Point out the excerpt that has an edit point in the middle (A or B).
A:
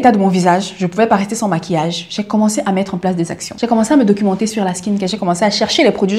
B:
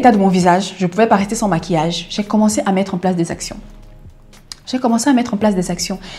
A